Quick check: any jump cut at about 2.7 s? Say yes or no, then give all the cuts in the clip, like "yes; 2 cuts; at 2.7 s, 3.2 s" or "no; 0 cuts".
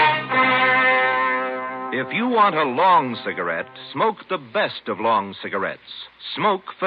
yes; 1 cut; at 2.7 s